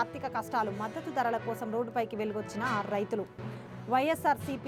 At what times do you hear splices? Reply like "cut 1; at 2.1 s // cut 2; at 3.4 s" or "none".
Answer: none